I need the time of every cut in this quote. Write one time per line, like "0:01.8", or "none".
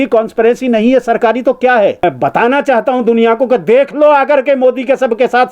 0:02.0